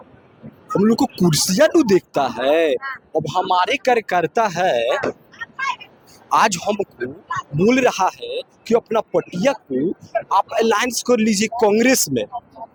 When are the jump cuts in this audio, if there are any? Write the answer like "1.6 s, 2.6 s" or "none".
none